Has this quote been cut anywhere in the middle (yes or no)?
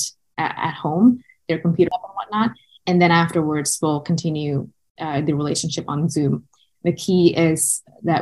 yes